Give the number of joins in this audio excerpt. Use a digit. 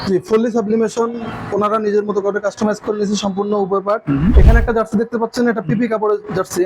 1